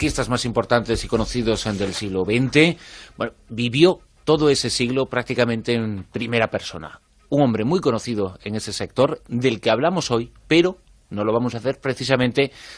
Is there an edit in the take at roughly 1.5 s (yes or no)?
no